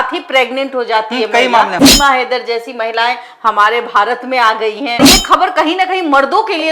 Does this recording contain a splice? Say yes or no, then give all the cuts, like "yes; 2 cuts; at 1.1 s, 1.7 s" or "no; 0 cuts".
yes; 2 cuts; at 1.8 s, 5.1 s